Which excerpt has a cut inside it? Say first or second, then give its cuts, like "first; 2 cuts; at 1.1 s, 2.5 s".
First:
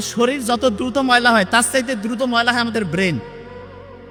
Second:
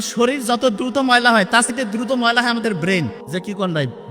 second; 2 cuts; at 1.7 s, 3.2 s